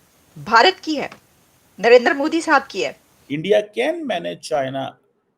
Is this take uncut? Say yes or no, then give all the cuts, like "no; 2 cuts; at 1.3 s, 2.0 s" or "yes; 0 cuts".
no; 1 cut; at 3.3 s